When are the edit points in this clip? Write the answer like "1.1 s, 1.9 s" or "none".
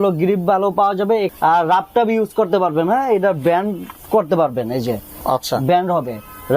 1.3 s